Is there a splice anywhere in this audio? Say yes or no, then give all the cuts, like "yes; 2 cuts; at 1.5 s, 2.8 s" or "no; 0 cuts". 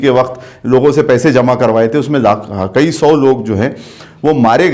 no; 0 cuts